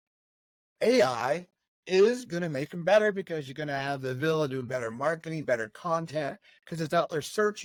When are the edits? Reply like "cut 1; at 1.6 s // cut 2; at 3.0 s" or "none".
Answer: none